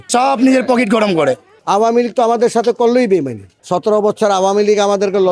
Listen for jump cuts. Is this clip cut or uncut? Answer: cut